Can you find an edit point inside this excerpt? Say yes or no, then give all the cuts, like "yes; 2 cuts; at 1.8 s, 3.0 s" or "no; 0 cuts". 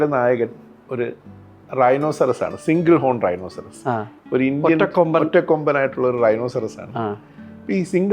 no; 0 cuts